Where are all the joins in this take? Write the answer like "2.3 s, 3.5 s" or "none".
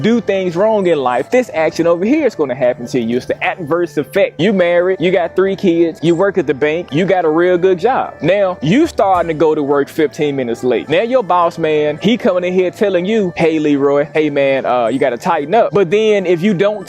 none